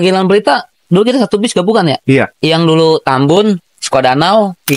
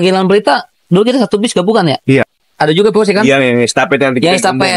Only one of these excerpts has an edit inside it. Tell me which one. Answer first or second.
second